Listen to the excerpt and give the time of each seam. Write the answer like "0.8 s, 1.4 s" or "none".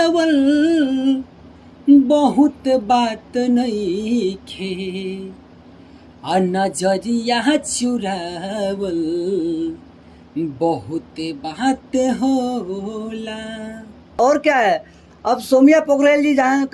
14.2 s